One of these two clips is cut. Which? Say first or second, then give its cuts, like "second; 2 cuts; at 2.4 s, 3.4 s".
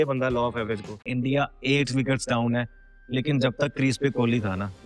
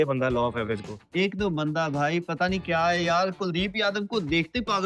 first; 1 cut; at 1.0 s